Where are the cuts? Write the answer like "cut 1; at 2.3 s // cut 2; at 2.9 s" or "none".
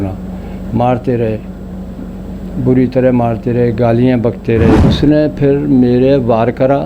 cut 1; at 4.9 s